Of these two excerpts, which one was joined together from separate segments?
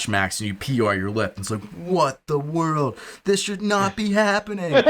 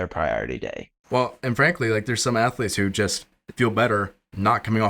second; 1 cut; at 1.0 s

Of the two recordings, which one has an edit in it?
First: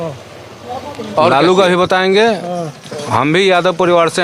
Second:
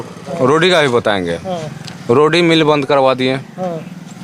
first; 1 cut; at 1.3 s

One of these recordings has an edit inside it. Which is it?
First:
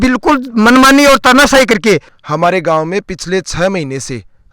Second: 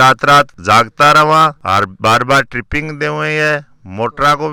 first; 1 cut; at 2.1 s

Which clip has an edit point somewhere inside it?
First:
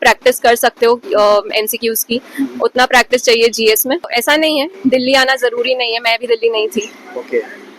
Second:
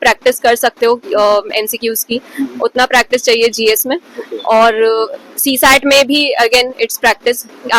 first; 1 cut; at 4.2 s

